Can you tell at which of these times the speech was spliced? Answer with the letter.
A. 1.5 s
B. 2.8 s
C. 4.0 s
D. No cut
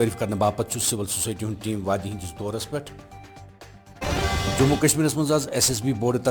C